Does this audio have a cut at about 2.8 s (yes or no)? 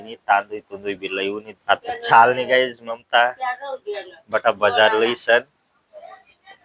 no